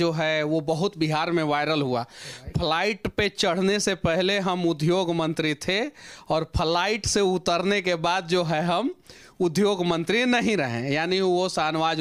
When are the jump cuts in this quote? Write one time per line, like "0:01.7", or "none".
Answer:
none

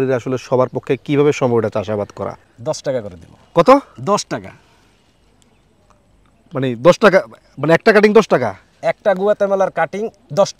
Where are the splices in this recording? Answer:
0:02.5

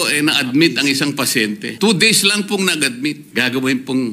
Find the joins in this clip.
0:01.7
0:03.2

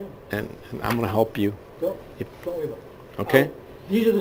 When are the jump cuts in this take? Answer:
none

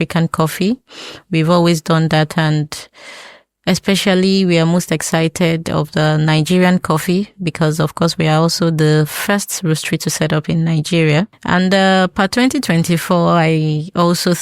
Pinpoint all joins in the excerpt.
0:11.4

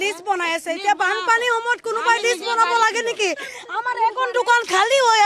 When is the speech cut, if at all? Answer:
none

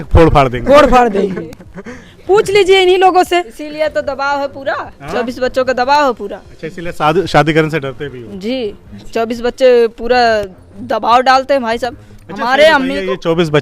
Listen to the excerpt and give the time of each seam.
none

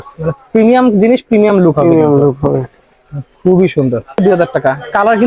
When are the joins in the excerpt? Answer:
0:04.2

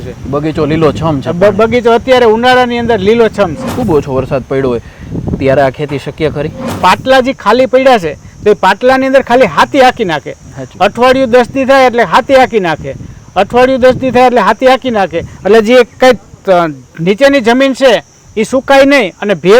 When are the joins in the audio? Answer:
0:03.7
0:06.8

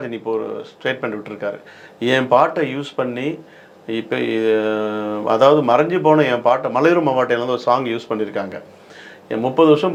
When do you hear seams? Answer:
none

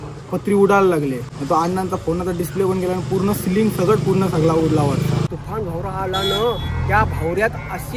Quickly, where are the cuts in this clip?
0:01.3
0:05.2

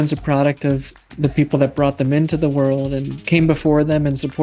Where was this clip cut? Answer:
none

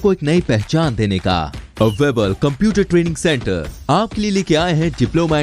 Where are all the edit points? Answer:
none

